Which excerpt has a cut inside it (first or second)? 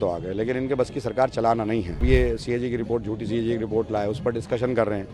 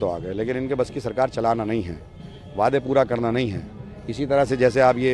first